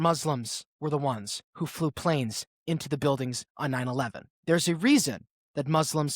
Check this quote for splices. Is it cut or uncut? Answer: cut